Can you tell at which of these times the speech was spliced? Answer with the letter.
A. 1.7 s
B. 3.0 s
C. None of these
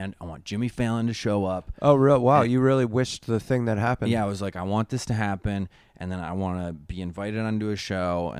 C